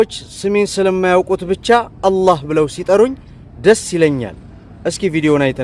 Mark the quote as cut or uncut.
uncut